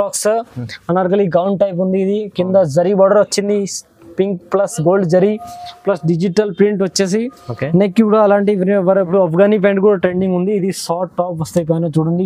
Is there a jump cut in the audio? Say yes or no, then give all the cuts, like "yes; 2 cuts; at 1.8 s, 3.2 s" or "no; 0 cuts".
yes; 1 cut; at 9.0 s